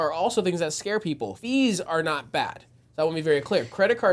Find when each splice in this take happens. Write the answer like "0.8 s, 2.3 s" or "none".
1.3 s